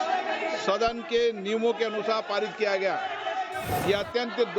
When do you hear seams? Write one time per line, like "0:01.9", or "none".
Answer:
0:03.7